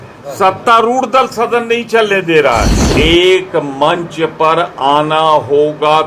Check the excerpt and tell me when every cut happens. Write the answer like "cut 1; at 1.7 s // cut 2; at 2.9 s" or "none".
cut 1; at 2.9 s